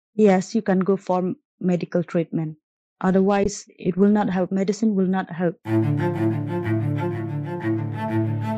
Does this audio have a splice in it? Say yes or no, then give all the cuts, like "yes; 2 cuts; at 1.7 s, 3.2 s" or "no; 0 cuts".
yes; 1 cut; at 5.6 s